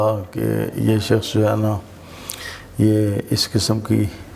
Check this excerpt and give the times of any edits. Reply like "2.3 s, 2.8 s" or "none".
none